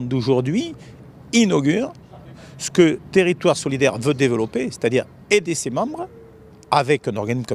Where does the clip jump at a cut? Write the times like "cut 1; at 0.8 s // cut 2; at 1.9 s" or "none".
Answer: none